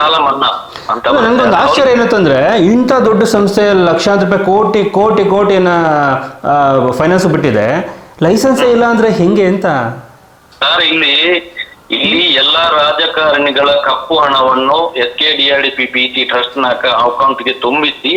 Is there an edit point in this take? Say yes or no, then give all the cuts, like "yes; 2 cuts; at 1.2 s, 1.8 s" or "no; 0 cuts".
no; 0 cuts